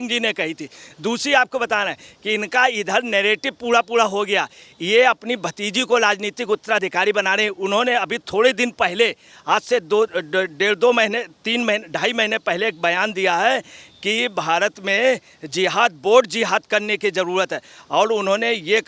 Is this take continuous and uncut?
yes; 0 cuts

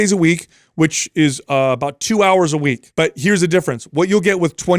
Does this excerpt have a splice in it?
yes; 1 cut; at 2.8 s

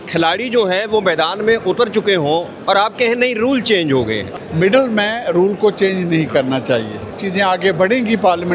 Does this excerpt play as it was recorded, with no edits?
no; 2 cuts; at 4.3 s, 7.2 s

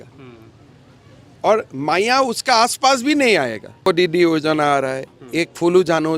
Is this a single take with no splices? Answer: no; 1 cut; at 3.9 s

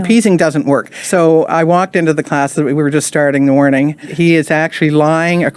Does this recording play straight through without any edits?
no; 2 cuts; at 1.0 s, 4.1 s

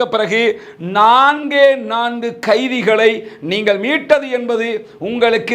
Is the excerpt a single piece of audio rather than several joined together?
yes; 0 cuts

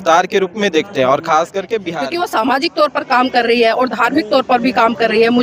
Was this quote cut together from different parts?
yes; 1 cut; at 1.9 s

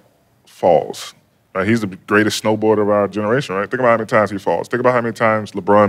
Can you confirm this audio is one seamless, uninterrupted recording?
yes; 0 cuts

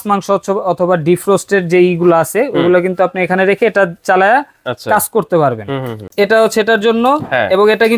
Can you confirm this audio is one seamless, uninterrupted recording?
no; 1 cut; at 6.1 s

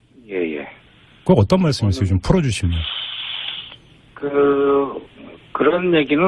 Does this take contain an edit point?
no; 0 cuts

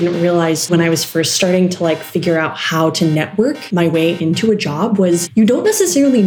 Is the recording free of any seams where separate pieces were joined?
no; 3 cuts; at 0.7 s, 3.6 s, 5.3 s

